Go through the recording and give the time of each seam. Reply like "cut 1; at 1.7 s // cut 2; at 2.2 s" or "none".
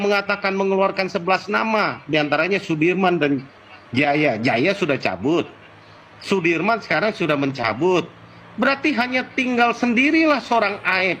none